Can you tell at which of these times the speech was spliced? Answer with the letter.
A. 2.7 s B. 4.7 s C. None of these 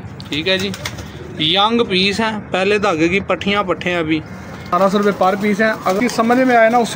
B